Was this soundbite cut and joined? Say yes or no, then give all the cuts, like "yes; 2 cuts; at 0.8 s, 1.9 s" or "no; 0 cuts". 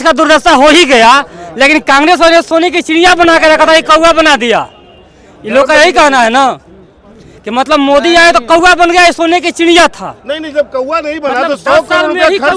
no; 0 cuts